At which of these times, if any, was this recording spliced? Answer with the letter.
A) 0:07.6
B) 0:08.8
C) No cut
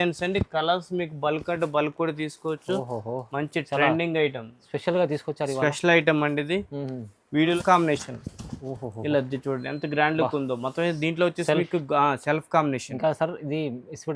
A